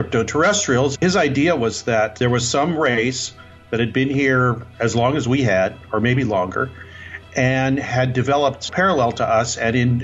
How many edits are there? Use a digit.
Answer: 3